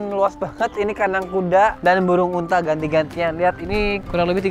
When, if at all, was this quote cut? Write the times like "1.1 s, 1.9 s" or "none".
none